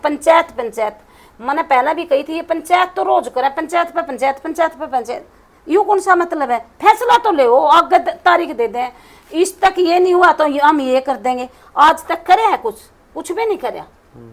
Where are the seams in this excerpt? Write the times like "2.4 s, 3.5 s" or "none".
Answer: none